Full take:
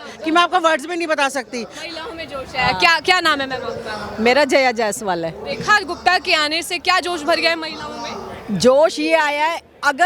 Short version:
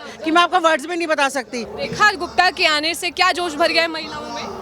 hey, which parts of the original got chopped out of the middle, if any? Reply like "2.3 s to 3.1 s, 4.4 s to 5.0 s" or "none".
1.7 s to 5.4 s